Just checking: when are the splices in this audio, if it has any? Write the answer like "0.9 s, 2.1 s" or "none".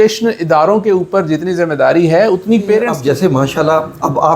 2.9 s